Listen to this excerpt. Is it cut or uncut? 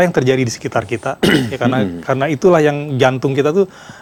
uncut